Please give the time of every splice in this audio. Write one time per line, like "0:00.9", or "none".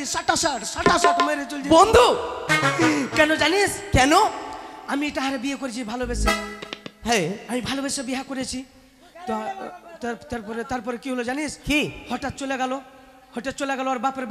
none